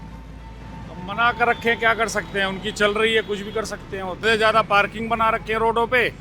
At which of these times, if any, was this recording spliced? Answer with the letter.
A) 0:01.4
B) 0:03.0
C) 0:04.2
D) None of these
C